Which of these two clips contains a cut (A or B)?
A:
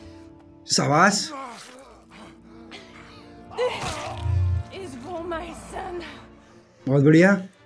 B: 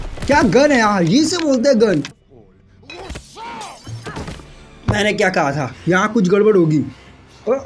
B